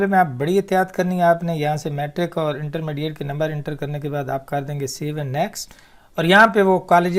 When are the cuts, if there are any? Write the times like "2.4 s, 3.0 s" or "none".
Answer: none